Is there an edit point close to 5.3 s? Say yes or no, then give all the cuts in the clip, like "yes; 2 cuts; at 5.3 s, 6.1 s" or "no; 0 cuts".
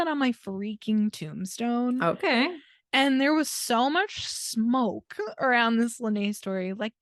yes; 1 cut; at 5.3 s